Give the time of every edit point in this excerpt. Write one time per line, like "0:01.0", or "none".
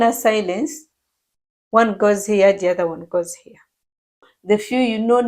0:04.3